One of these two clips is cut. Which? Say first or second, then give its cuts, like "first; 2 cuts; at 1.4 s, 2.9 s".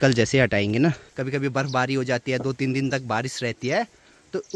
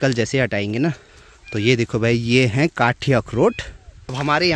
first; 1 cut; at 1.1 s